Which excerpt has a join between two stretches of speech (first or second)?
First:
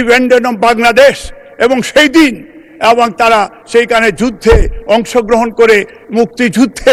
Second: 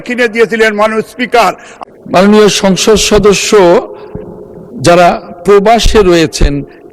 second